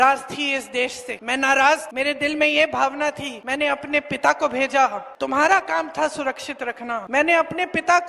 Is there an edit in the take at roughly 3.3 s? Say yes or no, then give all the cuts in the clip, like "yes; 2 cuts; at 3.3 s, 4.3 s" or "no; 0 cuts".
yes; 5 cuts; at 1.1 s, 1.9 s, 3.3 s, 5.1 s, 7.1 s